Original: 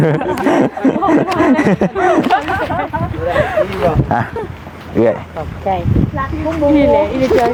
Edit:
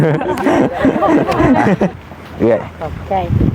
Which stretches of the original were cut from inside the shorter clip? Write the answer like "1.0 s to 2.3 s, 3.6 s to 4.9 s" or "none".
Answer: 1.9 s to 4.5 s